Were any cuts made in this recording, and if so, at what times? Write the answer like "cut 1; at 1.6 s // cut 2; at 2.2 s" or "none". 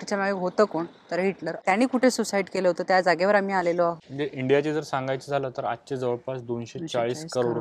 cut 1; at 1.6 s // cut 2; at 4.0 s

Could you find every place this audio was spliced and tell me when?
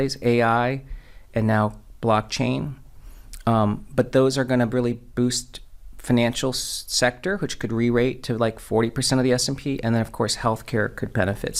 none

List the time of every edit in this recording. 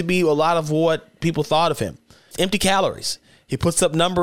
cut 1; at 2.3 s

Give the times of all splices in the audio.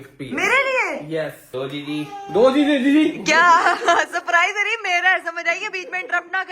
cut 1; at 1.4 s

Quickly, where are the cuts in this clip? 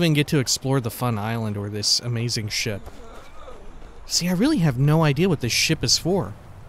none

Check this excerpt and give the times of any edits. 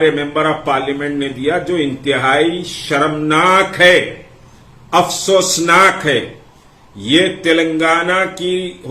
none

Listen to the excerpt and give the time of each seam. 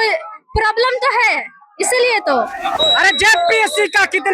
cut 1; at 2.8 s

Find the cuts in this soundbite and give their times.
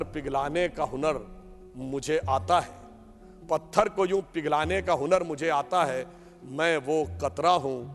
none

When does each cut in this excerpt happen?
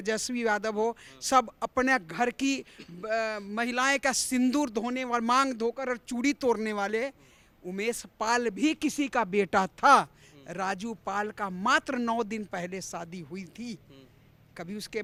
none

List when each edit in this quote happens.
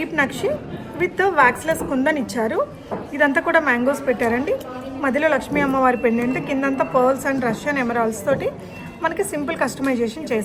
none

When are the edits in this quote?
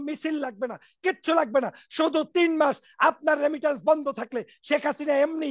none

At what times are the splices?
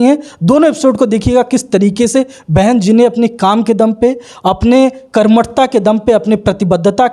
none

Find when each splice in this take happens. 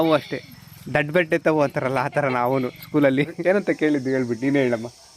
cut 1; at 3.4 s

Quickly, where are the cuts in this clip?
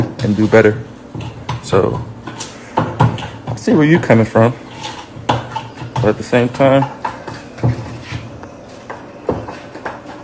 none

